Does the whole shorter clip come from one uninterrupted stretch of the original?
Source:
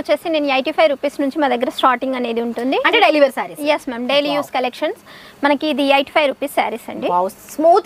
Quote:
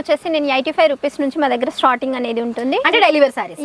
yes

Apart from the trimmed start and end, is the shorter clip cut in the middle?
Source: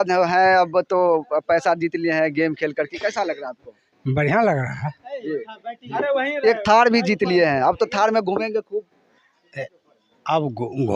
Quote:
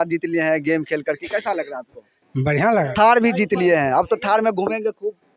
yes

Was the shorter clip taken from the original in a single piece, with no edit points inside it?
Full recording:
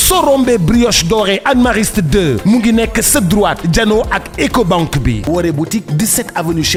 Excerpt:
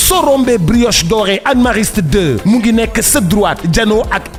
yes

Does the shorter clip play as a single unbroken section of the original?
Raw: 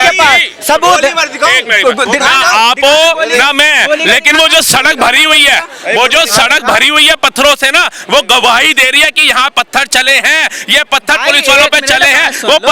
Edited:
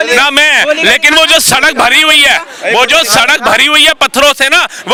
yes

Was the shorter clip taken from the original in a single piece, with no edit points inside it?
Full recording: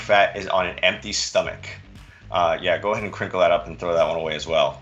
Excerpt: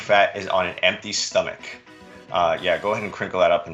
yes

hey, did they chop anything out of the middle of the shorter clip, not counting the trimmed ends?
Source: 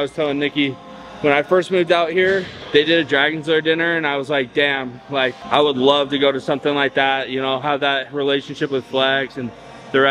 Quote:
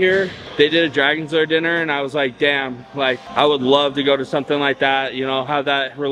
no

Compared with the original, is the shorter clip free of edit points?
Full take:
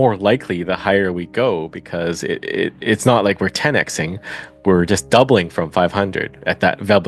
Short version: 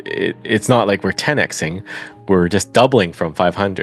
yes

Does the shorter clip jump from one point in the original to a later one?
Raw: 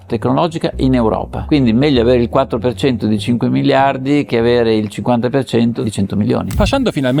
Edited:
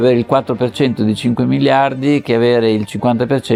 no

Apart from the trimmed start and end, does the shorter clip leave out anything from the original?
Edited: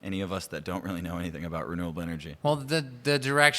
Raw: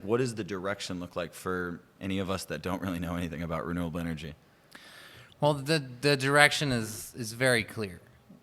yes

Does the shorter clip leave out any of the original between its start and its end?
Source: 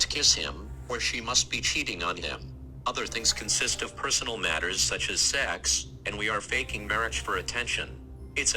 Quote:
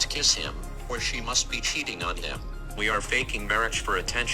yes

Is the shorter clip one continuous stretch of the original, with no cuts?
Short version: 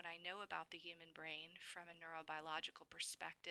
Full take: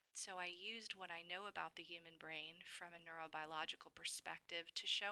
yes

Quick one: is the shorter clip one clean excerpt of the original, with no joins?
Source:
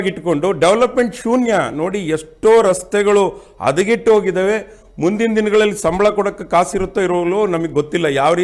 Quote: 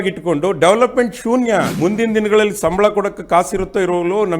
no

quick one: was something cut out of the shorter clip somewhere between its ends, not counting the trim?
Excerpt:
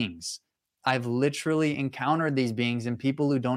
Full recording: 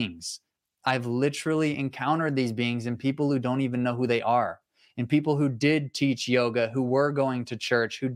no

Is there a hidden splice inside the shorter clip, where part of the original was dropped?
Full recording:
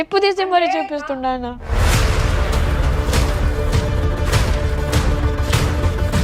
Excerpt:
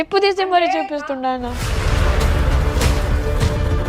yes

